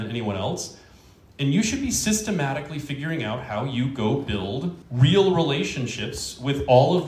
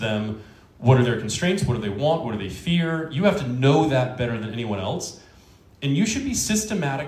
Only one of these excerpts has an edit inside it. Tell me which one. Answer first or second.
first